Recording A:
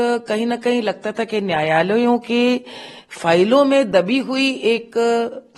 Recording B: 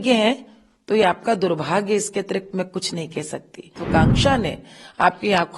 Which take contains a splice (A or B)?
B